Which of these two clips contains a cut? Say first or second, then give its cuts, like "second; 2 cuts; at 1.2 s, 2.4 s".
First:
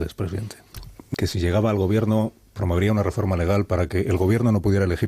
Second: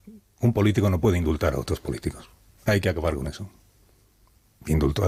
first; 1 cut; at 1.1 s